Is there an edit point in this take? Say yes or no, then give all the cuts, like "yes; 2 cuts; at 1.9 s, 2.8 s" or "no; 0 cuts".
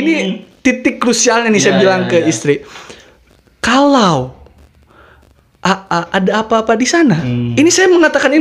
no; 0 cuts